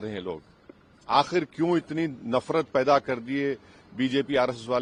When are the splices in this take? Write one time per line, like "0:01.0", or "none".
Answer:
none